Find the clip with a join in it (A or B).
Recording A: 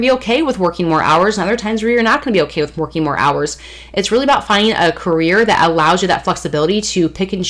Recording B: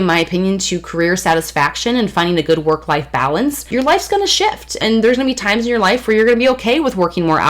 B